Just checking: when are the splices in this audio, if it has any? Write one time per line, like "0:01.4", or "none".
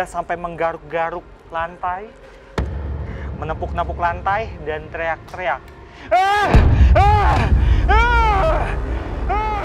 none